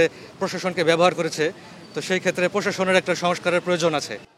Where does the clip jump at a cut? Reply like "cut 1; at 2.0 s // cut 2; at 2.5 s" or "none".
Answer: none